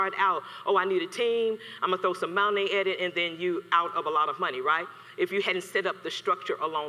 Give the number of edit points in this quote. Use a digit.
0